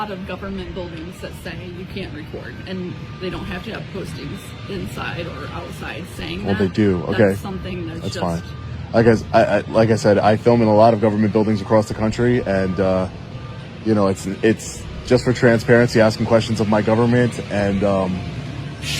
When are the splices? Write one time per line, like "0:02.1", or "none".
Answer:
none